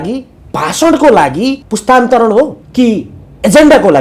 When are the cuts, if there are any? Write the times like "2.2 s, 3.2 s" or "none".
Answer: 1.7 s, 2.6 s